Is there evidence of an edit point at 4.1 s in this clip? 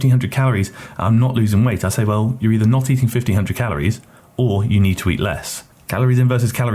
no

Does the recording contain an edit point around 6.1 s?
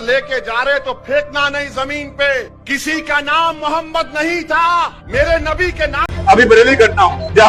yes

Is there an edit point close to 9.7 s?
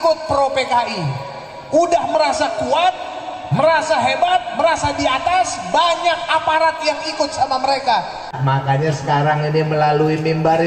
no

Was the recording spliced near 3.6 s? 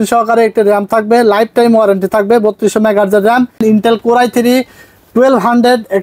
yes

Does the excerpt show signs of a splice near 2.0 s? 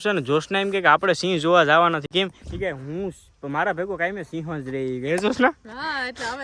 no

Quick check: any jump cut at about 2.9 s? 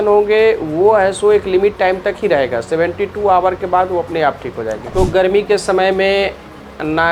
no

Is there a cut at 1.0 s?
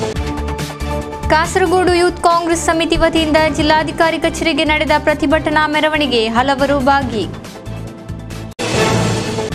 yes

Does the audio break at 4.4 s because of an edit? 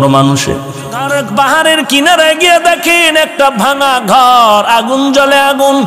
no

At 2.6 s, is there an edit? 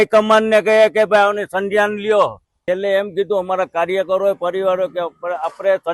yes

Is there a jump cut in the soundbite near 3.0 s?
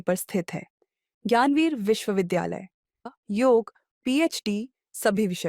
yes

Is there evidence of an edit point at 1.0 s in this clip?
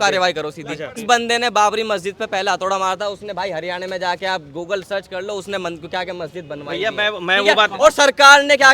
yes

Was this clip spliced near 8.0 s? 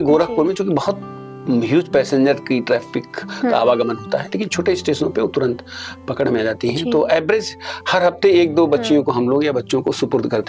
no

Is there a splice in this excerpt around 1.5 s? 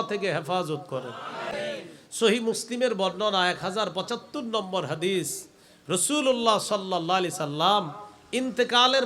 yes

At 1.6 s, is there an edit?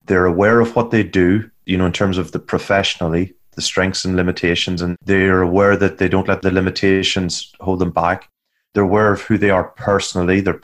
yes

